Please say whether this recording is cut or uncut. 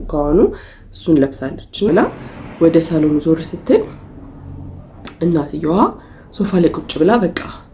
cut